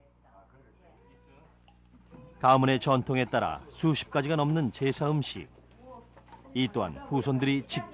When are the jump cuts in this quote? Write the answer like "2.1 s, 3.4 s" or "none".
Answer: 4.5 s